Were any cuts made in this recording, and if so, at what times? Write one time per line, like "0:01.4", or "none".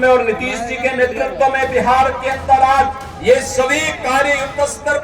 0:03.1